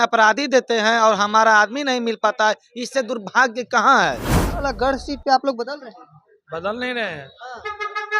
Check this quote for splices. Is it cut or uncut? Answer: cut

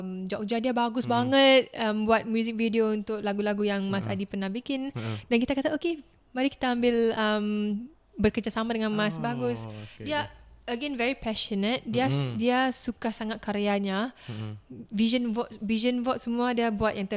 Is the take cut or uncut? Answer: uncut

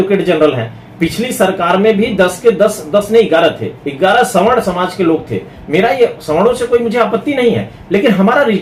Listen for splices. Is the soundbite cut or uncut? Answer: uncut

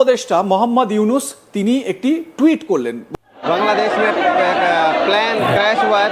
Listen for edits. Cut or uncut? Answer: cut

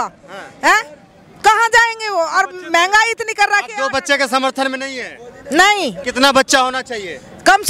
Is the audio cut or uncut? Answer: uncut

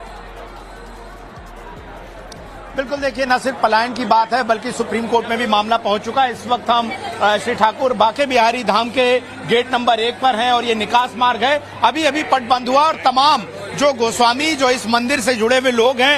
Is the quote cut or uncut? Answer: uncut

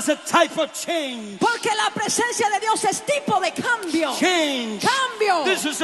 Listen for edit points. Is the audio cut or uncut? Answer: uncut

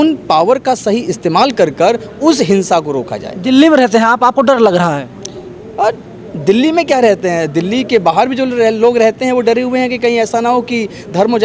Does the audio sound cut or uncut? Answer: uncut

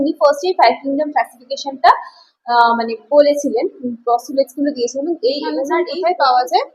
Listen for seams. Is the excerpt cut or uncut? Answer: cut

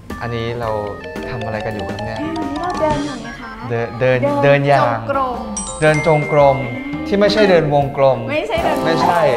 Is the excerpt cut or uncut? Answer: uncut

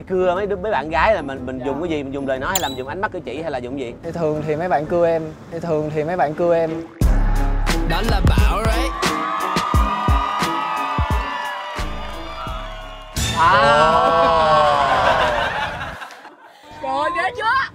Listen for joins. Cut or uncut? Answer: uncut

